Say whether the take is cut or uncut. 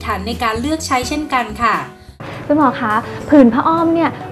cut